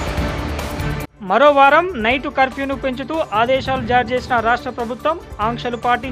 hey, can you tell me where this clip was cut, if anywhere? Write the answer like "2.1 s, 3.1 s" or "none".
1.1 s